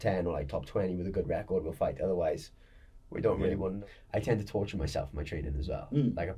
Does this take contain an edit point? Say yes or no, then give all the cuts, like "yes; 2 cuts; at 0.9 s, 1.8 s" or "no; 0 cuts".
yes; 1 cut; at 3.8 s